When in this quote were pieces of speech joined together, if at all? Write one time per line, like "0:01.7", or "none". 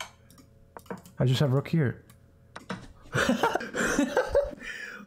0:03.7